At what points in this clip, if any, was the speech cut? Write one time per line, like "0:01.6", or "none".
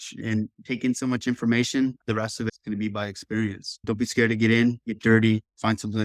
none